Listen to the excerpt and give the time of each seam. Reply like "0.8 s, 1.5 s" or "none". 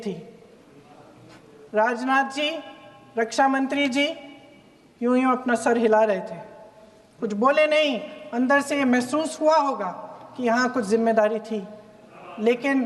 none